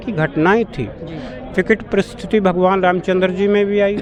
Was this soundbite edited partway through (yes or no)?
no